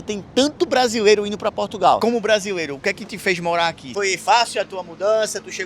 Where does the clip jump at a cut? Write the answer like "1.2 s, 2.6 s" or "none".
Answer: 2.0 s, 3.8 s